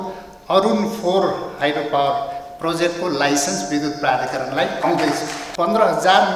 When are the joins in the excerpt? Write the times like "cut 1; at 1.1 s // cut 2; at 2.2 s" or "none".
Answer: cut 1; at 5.4 s